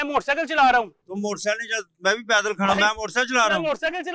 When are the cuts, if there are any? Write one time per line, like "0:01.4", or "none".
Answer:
none